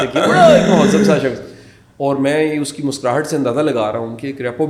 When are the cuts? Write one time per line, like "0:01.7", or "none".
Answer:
none